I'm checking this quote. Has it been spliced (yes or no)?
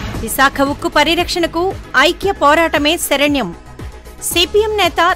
no